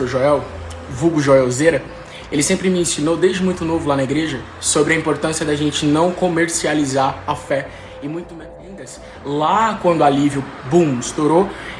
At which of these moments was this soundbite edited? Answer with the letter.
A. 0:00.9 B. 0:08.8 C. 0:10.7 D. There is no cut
B